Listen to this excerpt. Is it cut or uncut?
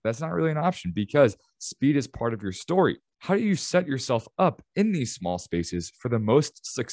cut